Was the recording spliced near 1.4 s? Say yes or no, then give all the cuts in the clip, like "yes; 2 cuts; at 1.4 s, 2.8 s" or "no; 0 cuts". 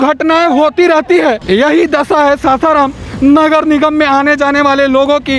yes; 1 cut; at 1.4 s